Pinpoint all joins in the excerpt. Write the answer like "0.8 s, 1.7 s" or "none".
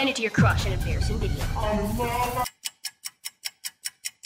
2.5 s